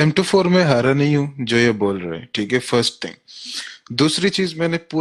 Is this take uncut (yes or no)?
yes